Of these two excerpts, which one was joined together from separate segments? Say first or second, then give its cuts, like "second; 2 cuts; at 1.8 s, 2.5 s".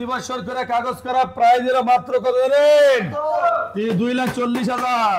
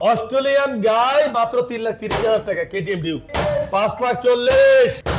second; 1 cut; at 3.3 s